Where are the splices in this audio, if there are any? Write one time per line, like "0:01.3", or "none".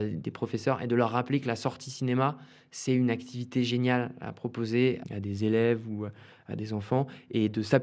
0:05.0